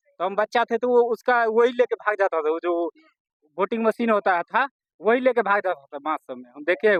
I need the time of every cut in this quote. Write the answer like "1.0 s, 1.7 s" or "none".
none